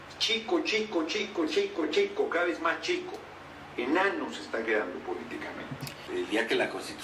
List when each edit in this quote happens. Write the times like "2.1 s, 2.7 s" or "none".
5.9 s